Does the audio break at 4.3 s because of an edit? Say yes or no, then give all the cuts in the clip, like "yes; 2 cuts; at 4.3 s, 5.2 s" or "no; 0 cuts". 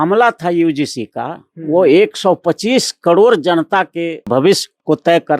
yes; 1 cut; at 4.3 s